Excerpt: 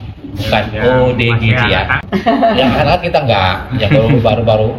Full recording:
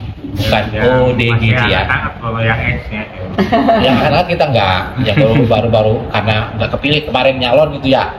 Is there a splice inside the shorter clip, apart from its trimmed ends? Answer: yes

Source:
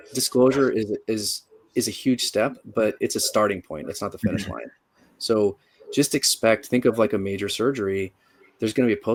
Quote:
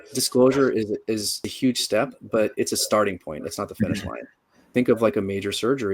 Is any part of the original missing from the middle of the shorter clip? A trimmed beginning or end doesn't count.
yes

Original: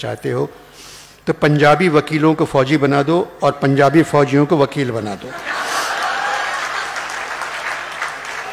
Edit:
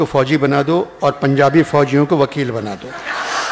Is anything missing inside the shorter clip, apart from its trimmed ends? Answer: no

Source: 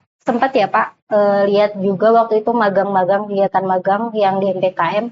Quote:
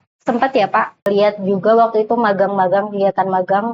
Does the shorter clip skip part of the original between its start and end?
yes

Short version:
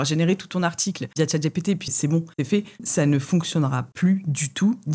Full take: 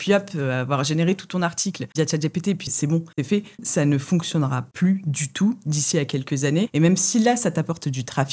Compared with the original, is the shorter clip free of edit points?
yes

